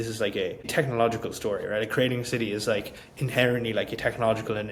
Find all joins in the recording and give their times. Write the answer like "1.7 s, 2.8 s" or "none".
none